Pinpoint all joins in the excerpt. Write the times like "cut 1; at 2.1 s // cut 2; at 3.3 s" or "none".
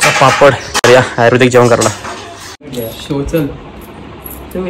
cut 1; at 2.7 s